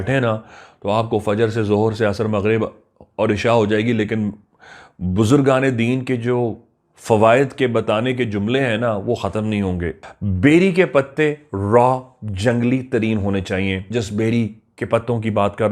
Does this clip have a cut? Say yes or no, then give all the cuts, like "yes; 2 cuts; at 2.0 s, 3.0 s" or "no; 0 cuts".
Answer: yes; 2 cuts; at 10.0 s, 13.8 s